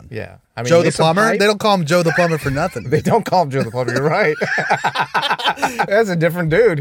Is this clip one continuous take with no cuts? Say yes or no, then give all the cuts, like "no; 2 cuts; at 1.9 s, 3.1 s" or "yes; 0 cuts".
no; 1 cut; at 5.9 s